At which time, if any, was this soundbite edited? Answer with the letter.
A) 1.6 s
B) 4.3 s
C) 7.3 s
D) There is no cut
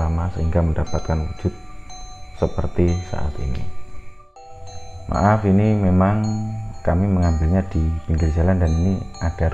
B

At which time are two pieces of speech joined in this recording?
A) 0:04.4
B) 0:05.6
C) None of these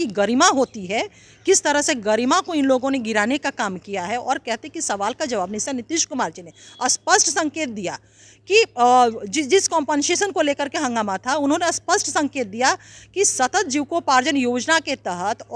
B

